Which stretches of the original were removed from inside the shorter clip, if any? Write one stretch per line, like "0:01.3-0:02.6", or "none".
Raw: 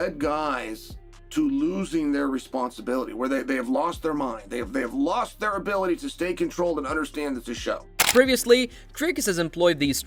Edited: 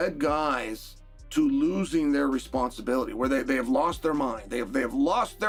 none